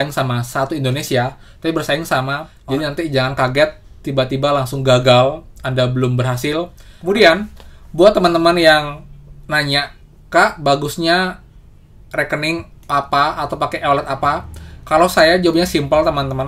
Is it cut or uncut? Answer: cut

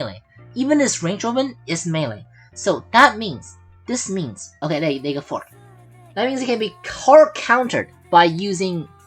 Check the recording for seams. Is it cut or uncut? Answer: cut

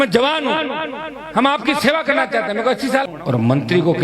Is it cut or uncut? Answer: cut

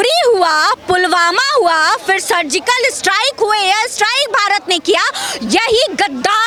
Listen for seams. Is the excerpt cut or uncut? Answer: uncut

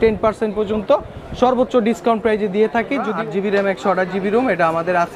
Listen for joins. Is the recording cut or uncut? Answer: cut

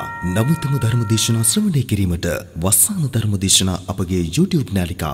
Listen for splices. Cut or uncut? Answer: uncut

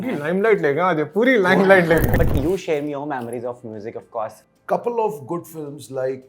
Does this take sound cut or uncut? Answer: cut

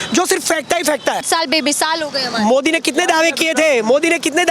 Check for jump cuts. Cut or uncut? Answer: cut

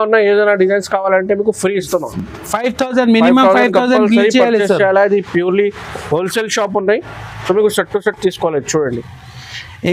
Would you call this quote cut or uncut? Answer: uncut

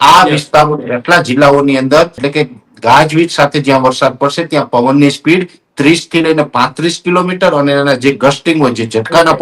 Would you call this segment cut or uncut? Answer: cut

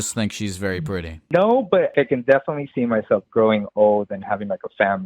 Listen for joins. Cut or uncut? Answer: cut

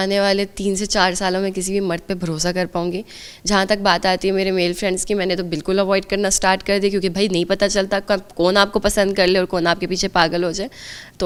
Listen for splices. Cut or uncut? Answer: uncut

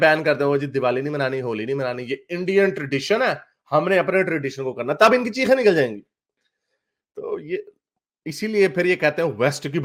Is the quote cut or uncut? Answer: uncut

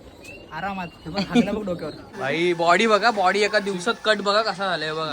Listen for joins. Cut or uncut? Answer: cut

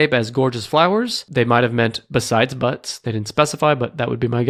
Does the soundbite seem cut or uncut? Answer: uncut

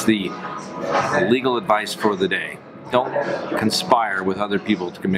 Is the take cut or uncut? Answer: uncut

